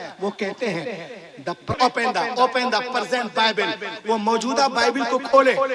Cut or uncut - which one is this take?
cut